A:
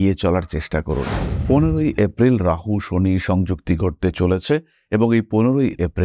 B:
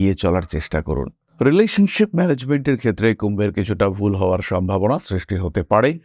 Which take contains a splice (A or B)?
A